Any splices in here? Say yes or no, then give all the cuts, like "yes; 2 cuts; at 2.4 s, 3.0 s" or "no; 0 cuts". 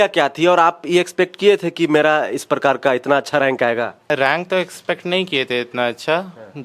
yes; 1 cut; at 4.1 s